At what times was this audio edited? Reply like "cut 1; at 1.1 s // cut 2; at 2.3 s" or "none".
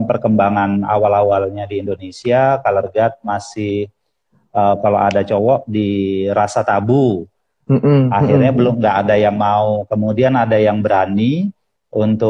none